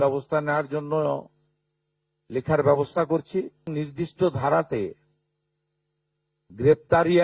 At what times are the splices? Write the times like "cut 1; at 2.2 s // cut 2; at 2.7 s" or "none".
cut 1; at 3.7 s